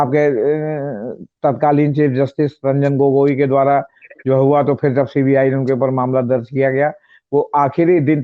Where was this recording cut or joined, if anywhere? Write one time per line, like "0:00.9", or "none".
none